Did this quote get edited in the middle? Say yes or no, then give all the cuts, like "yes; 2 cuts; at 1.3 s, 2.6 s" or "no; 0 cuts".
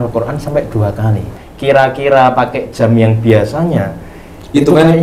yes; 1 cut; at 1.4 s